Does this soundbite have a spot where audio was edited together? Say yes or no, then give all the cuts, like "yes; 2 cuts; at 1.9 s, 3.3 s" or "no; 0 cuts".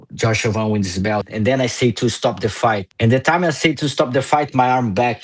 yes; 2 cuts; at 1.3 s, 2.9 s